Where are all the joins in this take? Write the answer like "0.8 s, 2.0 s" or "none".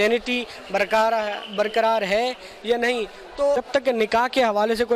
3.6 s